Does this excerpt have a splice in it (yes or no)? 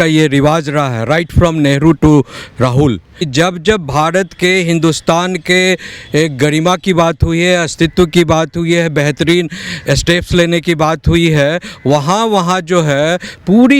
yes